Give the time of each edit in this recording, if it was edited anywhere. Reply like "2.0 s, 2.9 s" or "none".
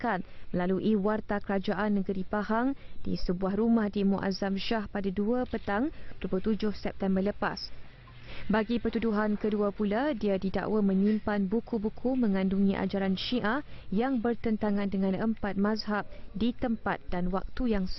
5.6 s

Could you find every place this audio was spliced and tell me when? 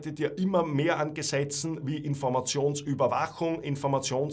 none

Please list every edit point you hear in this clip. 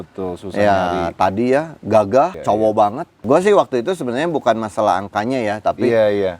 2.4 s, 3.2 s

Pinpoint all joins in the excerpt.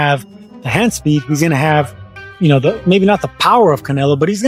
none

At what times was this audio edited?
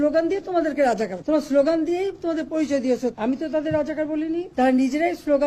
1.2 s, 3.1 s, 4.5 s

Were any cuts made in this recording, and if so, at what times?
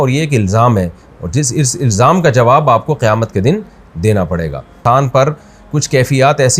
4.8 s

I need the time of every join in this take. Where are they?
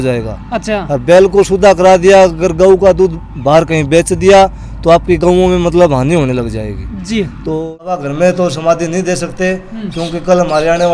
7.6 s

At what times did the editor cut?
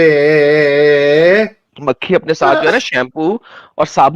1.6 s

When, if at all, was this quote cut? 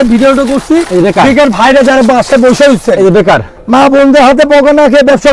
none

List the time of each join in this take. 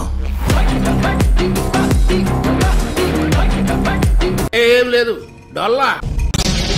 none

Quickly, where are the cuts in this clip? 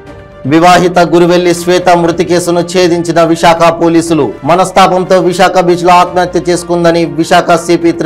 none

